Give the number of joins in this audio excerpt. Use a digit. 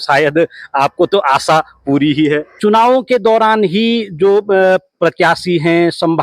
1